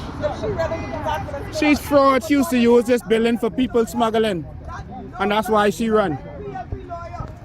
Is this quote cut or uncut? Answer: cut